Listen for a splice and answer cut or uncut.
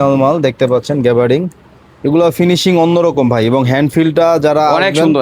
uncut